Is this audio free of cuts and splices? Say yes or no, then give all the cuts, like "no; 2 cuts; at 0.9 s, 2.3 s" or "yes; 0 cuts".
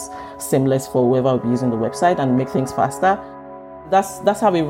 no; 1 cut; at 3.7 s